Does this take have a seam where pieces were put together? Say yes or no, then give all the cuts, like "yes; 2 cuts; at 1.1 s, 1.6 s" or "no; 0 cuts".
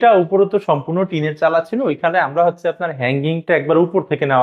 no; 0 cuts